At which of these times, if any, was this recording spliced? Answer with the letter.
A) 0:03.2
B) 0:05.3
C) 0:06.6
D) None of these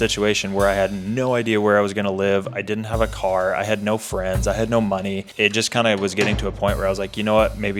D